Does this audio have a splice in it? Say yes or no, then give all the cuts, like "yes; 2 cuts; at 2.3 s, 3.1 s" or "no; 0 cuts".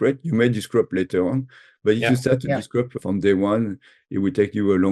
no; 0 cuts